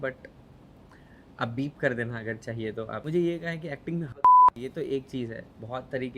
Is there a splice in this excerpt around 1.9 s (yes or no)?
no